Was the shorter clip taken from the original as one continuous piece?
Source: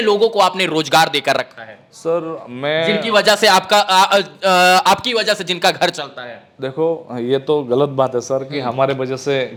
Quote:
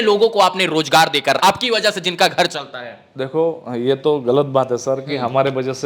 no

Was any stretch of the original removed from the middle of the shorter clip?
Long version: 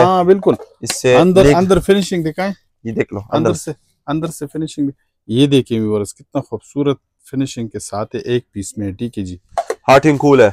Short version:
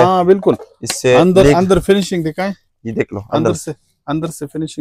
no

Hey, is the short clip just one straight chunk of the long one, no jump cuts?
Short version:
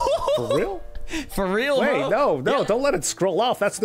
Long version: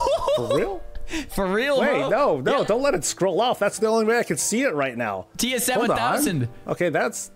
yes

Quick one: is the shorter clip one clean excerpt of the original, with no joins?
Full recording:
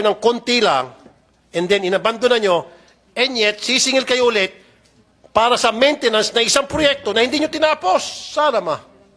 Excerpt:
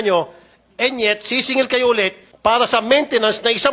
no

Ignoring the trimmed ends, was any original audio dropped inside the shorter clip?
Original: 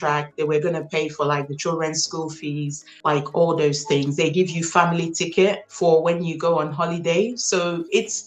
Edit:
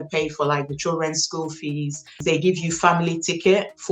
yes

